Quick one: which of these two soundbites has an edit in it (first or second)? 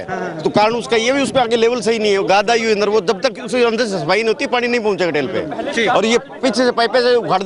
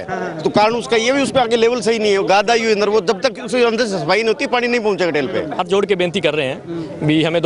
second